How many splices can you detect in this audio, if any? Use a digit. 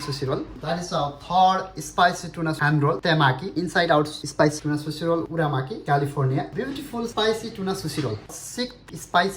2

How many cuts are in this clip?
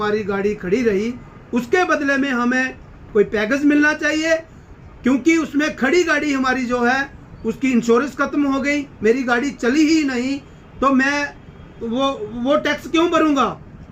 0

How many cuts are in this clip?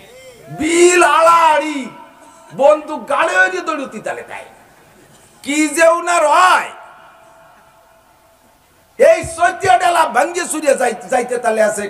0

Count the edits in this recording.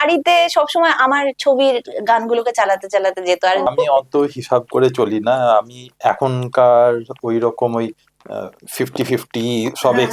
1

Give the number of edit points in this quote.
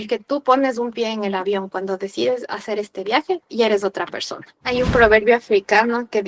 1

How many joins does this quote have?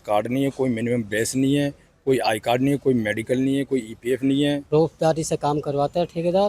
1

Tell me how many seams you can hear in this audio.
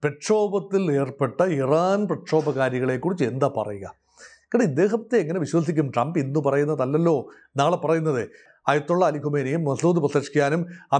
1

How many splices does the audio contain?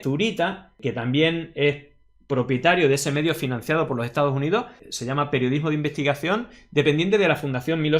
0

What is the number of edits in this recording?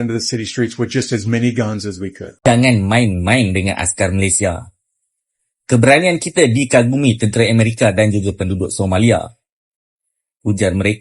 1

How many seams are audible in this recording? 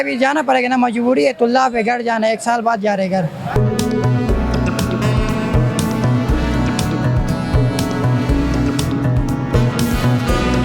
0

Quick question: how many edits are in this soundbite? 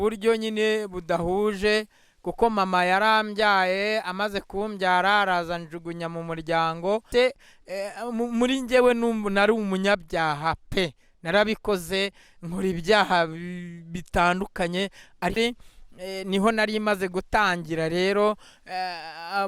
2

